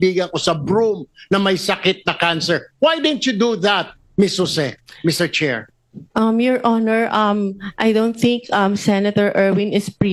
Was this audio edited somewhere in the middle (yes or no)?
no